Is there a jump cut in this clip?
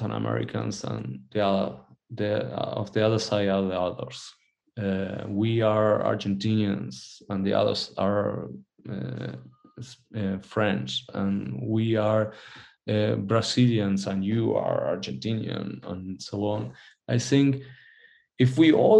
no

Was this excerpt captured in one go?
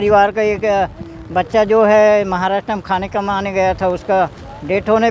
yes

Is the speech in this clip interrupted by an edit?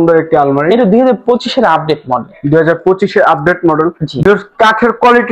no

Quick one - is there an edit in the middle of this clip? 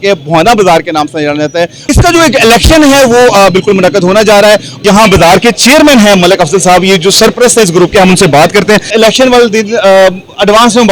yes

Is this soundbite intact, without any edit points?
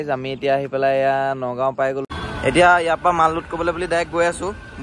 no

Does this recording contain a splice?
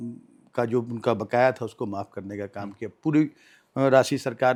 no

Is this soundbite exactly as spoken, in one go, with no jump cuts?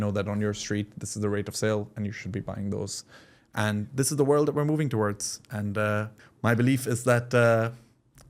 no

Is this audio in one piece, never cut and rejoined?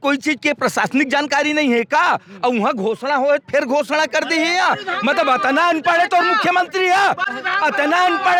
yes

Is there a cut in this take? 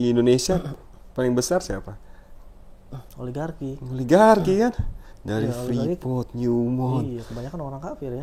no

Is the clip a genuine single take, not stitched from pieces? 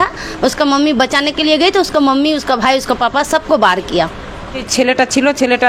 no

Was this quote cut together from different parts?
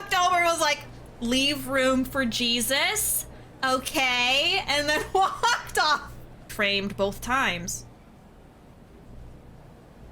yes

